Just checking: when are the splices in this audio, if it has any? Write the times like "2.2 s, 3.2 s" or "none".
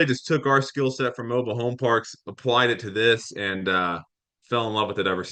none